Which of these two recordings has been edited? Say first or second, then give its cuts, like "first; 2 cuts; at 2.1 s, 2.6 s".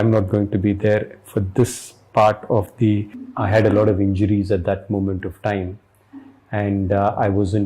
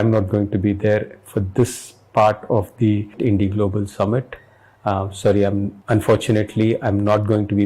first; 1 cut; at 3.1 s